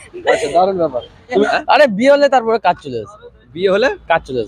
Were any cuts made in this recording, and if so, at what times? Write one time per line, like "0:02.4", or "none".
0:01.4